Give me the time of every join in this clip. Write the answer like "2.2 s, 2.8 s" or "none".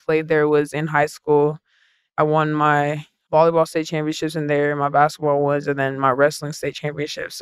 2.0 s, 3.1 s